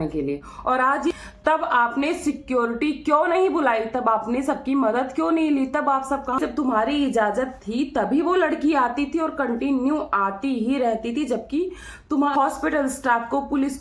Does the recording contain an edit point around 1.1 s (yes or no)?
yes